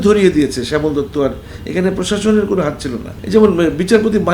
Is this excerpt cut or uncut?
cut